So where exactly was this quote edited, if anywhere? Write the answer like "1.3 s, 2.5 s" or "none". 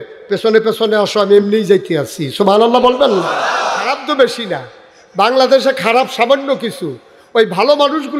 3.9 s

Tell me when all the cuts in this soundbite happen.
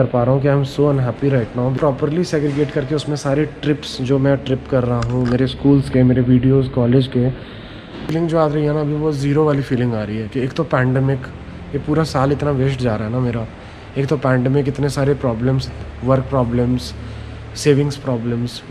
1.8 s, 8.1 s

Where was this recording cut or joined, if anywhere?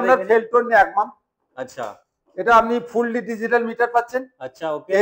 none

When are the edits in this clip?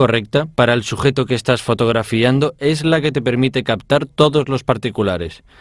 2.4 s

